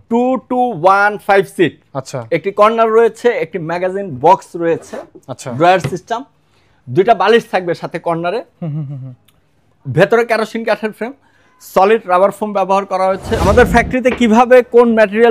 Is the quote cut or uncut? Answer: cut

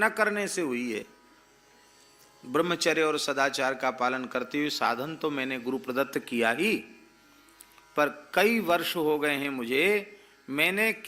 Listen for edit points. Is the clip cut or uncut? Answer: uncut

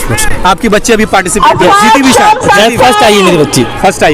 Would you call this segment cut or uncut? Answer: uncut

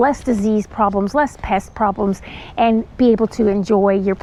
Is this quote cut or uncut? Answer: uncut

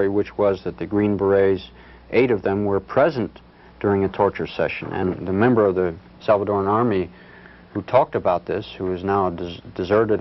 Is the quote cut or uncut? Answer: cut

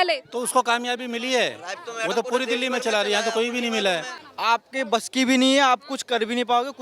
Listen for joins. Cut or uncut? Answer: cut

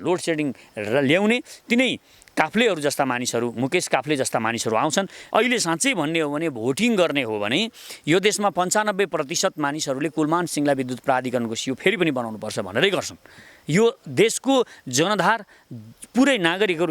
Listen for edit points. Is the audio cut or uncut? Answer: cut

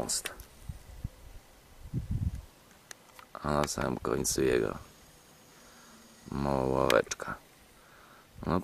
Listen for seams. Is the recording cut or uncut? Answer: uncut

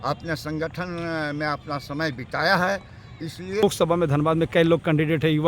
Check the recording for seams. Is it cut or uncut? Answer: cut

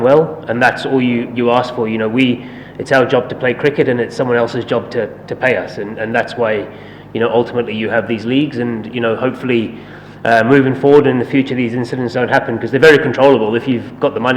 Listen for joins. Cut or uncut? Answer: uncut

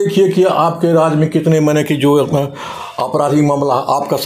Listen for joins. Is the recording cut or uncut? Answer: uncut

